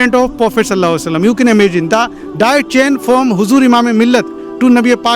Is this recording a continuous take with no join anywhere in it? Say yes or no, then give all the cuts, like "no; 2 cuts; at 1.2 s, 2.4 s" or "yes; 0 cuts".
yes; 0 cuts